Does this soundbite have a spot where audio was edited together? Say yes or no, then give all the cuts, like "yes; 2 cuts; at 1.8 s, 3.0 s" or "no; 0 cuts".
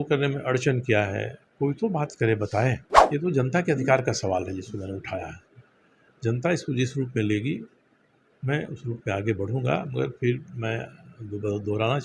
yes; 2 cuts; at 1.4 s, 2.9 s